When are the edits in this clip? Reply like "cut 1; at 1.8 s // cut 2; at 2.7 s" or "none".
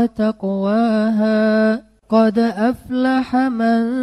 cut 1; at 1.9 s